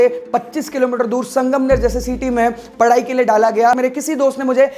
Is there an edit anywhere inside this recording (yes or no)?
yes